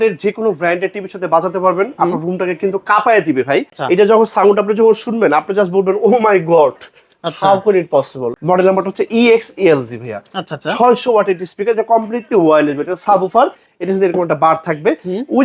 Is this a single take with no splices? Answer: no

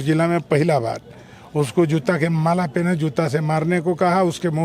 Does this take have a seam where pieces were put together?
no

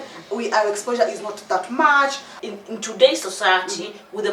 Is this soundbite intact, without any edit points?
no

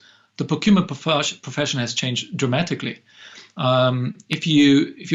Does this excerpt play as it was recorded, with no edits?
yes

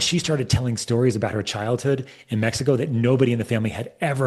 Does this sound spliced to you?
no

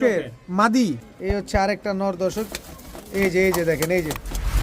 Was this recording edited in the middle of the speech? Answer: yes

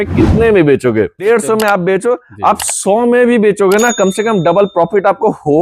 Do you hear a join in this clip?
yes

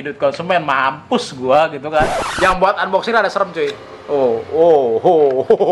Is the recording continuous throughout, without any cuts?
no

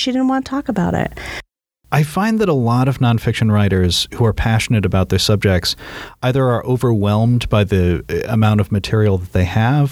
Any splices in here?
yes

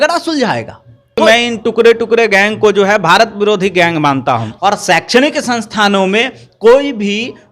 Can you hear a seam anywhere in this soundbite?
yes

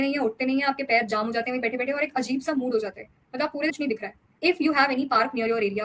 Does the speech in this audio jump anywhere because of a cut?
no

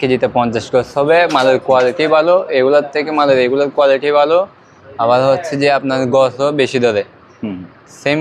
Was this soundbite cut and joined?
no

